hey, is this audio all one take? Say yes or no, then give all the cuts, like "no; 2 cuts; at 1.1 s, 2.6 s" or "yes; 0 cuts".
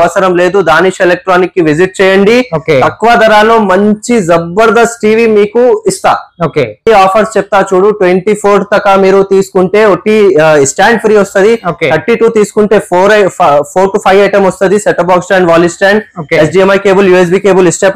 no; 1 cut; at 6.9 s